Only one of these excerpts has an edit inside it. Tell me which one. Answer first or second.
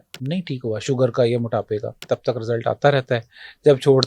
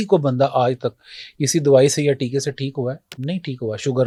first